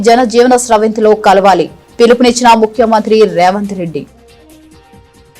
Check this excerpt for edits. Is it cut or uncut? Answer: cut